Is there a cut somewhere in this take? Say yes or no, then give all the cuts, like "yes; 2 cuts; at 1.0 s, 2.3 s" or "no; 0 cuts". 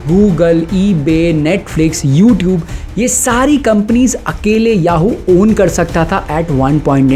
no; 0 cuts